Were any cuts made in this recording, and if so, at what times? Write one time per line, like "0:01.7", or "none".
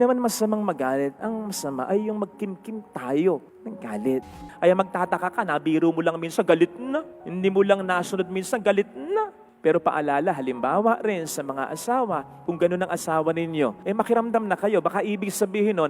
0:04.4